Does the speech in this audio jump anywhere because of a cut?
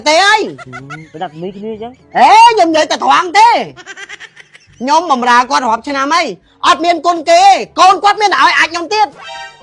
no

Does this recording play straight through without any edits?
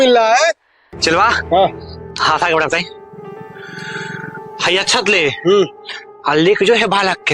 no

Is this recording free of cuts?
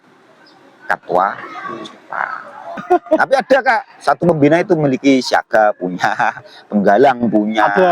no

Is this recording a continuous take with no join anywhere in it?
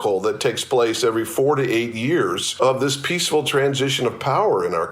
no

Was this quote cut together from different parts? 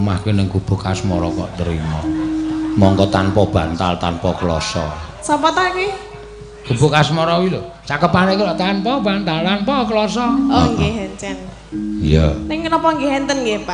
no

